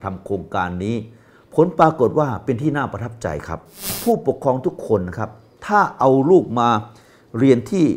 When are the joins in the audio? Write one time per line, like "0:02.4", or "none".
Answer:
0:03.8